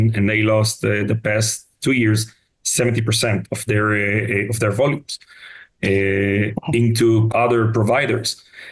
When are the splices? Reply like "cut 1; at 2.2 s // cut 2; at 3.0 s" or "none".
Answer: cut 1; at 7.3 s